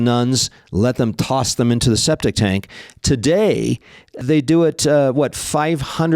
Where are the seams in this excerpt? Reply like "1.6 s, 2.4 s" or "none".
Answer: 4.2 s